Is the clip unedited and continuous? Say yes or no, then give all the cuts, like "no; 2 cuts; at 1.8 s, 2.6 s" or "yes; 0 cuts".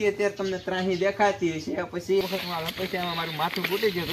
no; 1 cut; at 2.2 s